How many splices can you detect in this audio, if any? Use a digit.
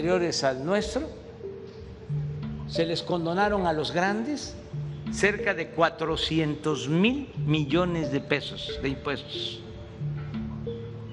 2